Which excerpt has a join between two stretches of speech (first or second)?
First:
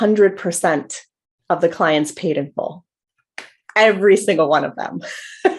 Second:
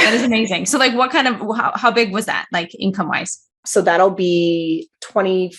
second